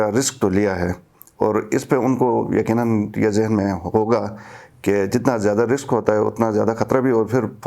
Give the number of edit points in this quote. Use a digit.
0